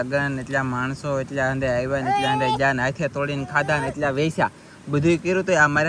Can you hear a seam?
no; 0 cuts

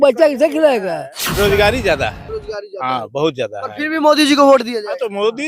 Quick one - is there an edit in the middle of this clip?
yes; 1 cut; at 1.3 s

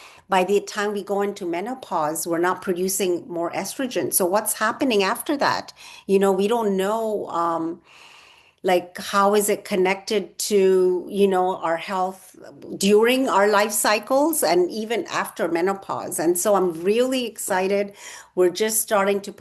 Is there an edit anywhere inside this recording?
no; 0 cuts

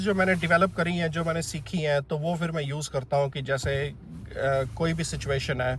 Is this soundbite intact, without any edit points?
yes; 0 cuts

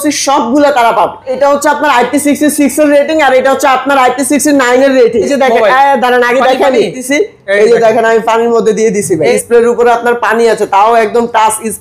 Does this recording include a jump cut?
yes; 4 cuts; at 1.3 s, 5.3 s, 7.0 s, 9.3 s

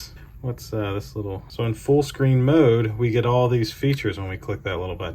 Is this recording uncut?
no; 1 cut; at 1.5 s

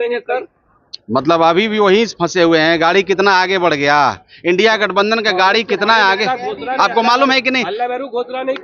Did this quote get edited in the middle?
no; 0 cuts

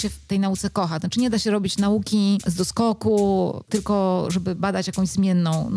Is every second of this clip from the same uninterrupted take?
no; 2 cuts; at 2.5 s, 4.5 s

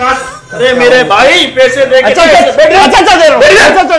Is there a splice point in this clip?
no; 0 cuts

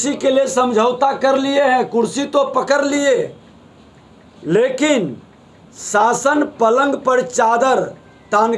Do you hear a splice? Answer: no; 0 cuts

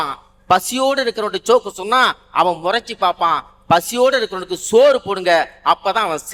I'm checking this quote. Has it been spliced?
no; 0 cuts

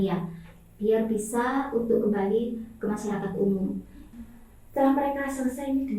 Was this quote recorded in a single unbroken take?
no; 1 cut; at 4.0 s

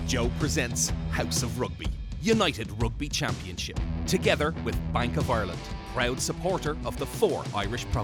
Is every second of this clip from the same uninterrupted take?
yes; 0 cuts

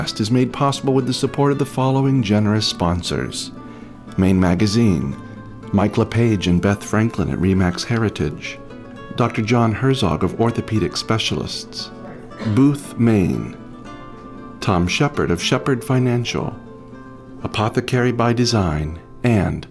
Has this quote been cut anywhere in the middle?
no; 0 cuts

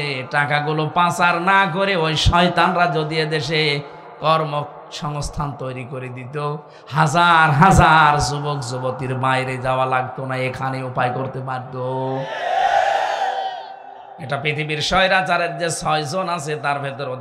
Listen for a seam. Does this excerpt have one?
yes; 1 cut; at 13.9 s

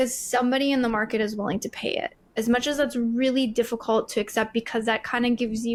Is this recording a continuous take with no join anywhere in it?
yes; 0 cuts

